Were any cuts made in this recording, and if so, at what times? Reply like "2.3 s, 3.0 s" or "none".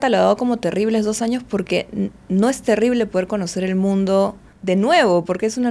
4.5 s